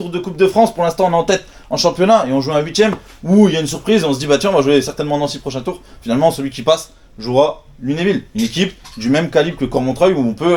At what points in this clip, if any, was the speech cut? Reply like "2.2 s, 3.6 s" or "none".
none